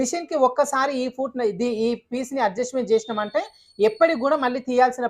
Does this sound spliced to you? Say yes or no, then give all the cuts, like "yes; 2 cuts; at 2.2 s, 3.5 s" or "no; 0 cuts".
no; 0 cuts